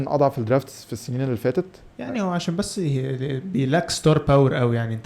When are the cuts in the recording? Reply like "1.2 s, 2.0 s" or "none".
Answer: none

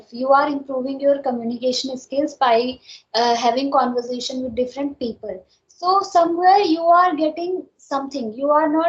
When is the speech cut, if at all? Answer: none

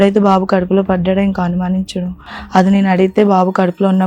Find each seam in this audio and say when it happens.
2.3 s

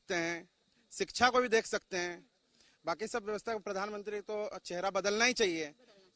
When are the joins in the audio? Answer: none

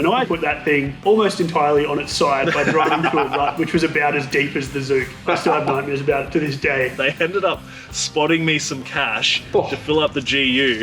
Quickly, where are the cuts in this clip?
5.4 s, 6.9 s

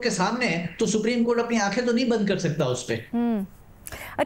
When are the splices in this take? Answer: none

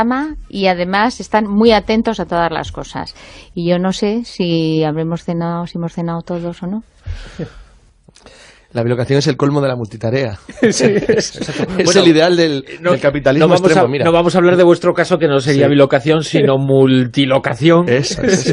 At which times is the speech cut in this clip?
14.0 s

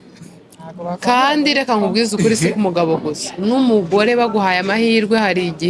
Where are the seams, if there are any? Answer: none

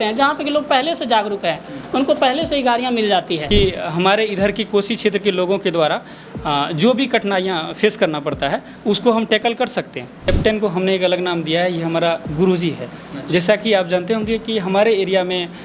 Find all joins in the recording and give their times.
3.4 s, 10.3 s

